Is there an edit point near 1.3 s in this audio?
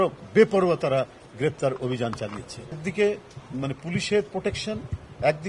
no; 1 cut; at 2.8 s

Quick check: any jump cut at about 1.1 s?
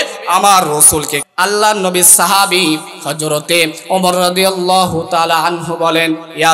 yes; 1 cut; at 1.1 s

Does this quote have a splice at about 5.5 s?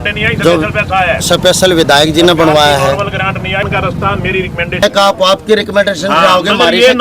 no; 0 cuts

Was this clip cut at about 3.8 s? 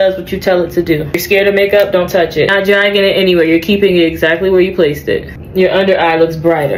no; 3 cuts; at 1.2 s, 2.5 s, 5.4 s

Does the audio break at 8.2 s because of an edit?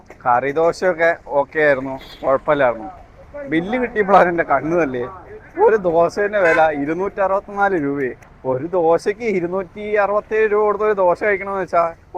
yes; 1 cut; at 8.2 s

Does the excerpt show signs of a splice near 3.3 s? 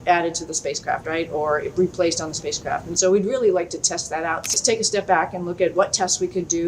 no; 1 cut; at 4.5 s

